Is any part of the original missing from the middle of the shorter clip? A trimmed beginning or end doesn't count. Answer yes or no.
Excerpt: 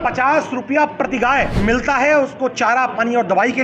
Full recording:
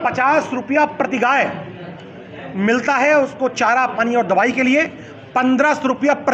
yes